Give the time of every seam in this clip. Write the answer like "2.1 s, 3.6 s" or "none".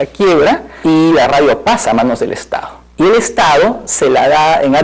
1.6 s